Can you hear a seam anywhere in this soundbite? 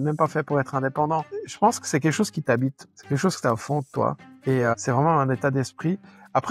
yes; 3 cuts; at 1.4 s, 2.9 s, 4.3 s

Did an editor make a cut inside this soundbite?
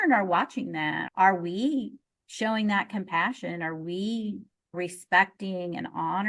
no; 0 cuts

